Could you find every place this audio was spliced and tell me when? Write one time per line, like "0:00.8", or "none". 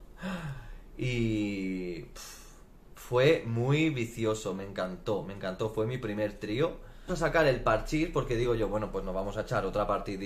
0:07.1